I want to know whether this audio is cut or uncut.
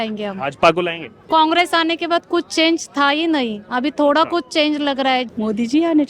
cut